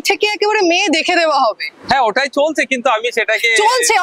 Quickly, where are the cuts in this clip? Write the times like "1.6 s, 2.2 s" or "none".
none